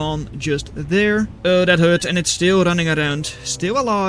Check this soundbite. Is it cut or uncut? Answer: cut